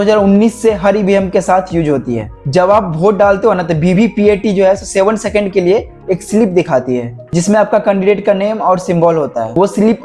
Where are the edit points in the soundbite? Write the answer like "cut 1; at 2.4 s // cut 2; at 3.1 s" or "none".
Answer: none